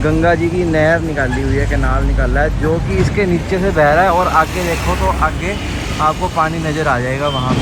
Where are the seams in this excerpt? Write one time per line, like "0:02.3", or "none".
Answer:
none